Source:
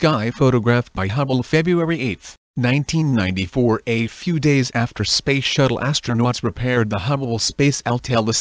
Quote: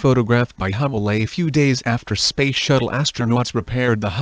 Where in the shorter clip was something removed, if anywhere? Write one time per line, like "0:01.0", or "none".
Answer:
0:01.0